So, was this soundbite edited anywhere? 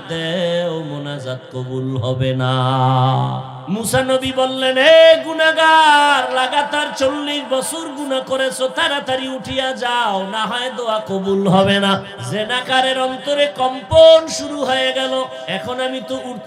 yes; 3 cuts; at 3.5 s, 12.2 s, 15.4 s

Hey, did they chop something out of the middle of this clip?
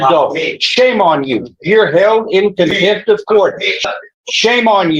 yes; 1 cut; at 3.8 s

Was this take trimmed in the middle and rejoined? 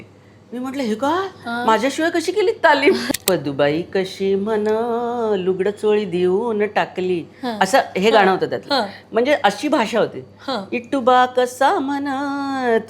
yes; 1 cut; at 3.0 s

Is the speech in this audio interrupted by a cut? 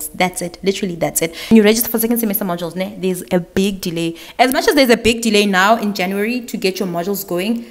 yes; 1 cut; at 1.5 s

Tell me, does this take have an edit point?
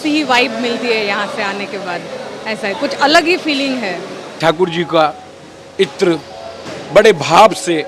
yes; 1 cut; at 4.3 s

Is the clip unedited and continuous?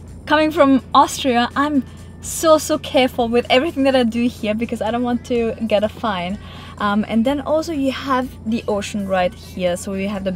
yes; 0 cuts

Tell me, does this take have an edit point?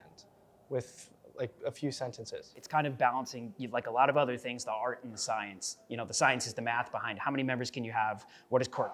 yes; 1 cut; at 2.5 s

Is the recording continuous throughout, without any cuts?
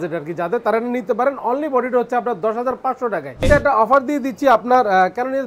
no; 1 cut; at 3.4 s

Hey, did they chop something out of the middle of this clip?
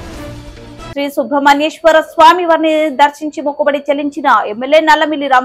yes; 1 cut; at 0.9 s

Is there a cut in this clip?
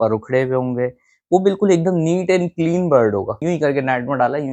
yes; 1 cut; at 3.4 s

